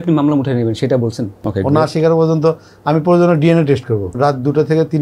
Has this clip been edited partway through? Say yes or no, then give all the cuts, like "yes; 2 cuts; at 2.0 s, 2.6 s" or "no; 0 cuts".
yes; 2 cuts; at 1.4 s, 4.1 s